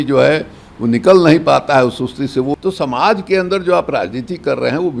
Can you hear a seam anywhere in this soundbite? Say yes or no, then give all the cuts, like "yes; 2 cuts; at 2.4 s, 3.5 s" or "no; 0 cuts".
yes; 1 cut; at 2.5 s